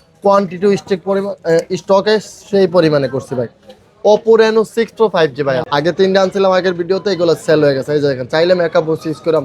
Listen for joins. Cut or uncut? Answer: cut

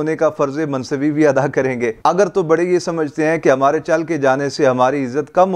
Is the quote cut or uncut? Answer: uncut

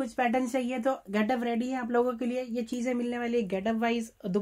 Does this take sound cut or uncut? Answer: uncut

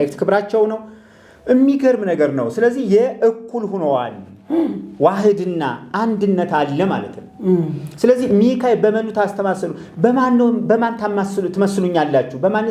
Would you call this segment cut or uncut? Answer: uncut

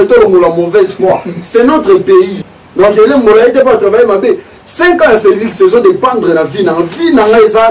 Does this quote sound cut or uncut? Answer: cut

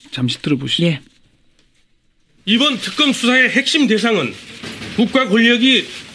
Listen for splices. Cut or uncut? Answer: uncut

